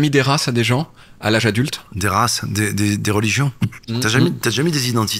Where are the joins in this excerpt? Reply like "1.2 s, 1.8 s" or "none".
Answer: none